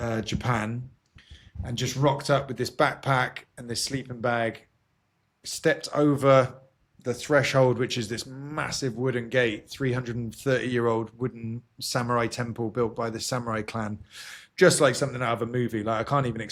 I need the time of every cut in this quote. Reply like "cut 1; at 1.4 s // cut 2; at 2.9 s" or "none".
none